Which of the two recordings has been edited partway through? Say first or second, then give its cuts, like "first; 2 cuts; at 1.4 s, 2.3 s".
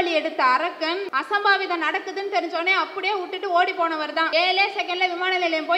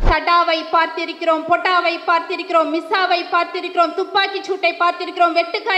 first; 2 cuts; at 1.1 s, 4.3 s